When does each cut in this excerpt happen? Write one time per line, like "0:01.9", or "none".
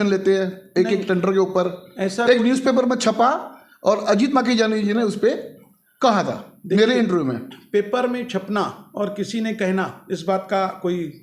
none